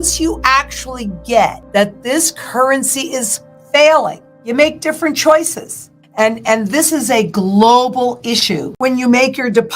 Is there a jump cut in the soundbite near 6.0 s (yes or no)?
no